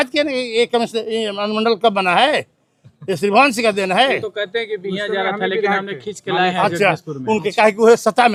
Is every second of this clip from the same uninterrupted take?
yes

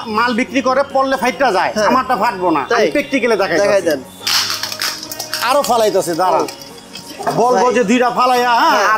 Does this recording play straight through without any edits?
yes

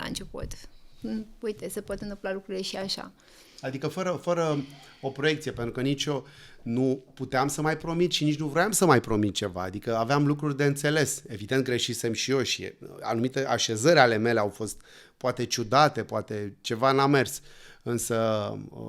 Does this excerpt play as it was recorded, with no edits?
yes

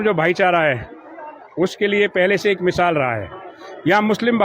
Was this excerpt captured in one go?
yes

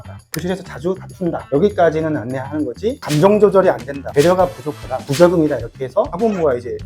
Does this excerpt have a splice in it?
yes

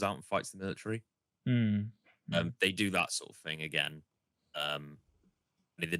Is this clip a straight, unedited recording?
yes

